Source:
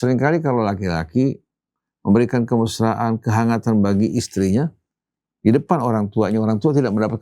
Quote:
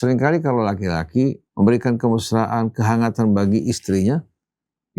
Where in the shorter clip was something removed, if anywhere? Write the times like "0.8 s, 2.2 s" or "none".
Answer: 1.4 s